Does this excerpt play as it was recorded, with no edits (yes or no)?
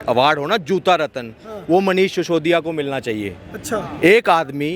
yes